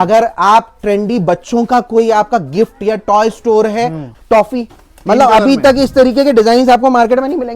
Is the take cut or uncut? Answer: cut